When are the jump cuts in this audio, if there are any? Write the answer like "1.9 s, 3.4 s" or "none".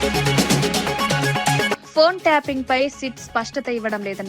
1.8 s